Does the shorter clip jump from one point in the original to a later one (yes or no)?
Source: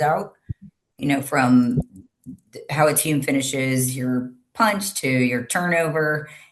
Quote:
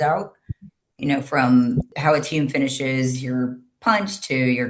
yes